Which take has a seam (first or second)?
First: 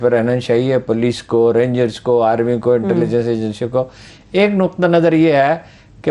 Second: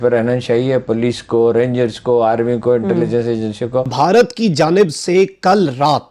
second